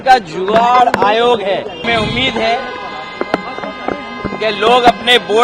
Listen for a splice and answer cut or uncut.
cut